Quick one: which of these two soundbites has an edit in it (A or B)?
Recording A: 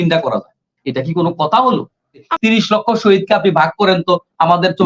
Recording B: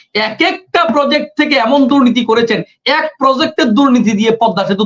A